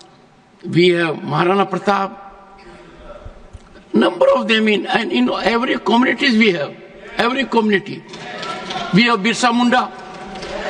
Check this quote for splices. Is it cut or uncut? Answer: uncut